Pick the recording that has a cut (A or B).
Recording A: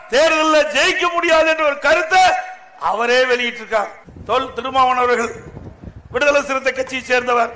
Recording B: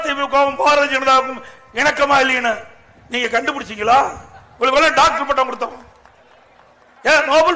A